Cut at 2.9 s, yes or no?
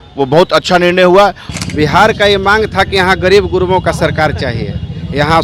no